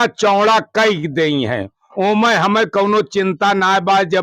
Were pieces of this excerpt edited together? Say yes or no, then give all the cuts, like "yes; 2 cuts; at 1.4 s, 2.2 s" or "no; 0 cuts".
no; 0 cuts